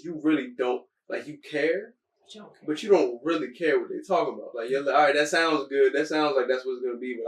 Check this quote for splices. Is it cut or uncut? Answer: uncut